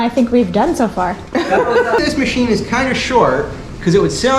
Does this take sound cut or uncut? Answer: cut